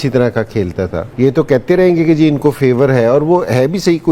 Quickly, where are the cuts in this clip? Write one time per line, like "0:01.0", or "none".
none